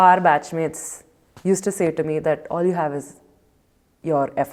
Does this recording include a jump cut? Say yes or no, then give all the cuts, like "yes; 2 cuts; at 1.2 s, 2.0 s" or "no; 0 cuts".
no; 0 cuts